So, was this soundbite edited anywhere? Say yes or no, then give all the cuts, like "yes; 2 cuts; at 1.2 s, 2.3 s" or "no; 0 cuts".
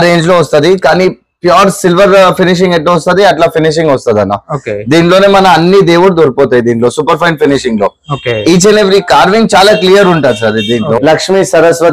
yes; 1 cut; at 11.0 s